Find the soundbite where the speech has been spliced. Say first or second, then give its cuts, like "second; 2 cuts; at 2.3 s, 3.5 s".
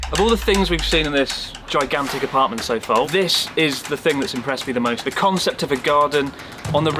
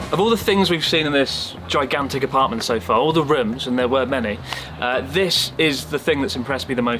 first; 2 cuts; at 3.1 s, 5.0 s